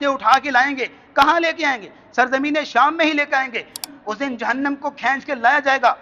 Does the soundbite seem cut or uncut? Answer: cut